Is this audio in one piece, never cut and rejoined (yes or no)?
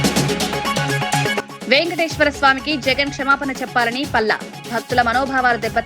no